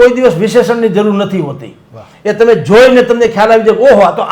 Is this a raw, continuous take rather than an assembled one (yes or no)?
yes